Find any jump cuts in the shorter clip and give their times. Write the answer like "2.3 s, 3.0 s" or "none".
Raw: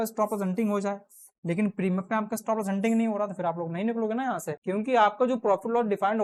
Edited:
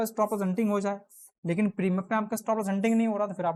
none